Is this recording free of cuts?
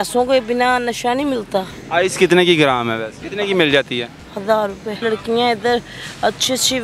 no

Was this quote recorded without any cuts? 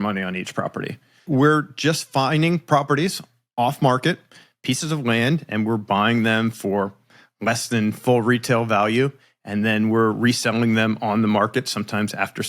no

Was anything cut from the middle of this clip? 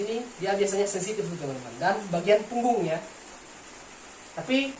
no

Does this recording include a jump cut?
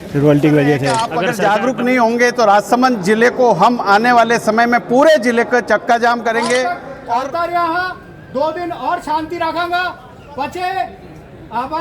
yes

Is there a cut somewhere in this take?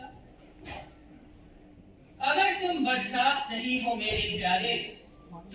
yes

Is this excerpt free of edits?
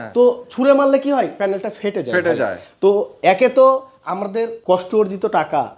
yes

